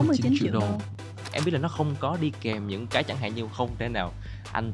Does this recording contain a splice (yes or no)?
yes